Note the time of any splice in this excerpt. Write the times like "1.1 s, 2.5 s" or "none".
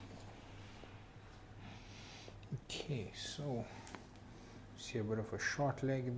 none